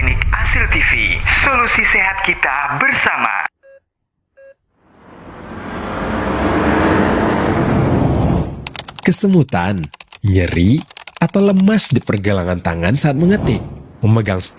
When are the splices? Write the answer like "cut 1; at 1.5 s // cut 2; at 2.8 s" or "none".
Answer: cut 1; at 5.1 s